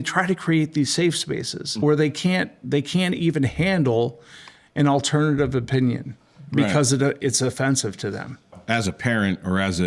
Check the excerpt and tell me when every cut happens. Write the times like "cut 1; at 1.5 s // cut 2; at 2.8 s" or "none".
cut 1; at 1.8 s // cut 2; at 8.6 s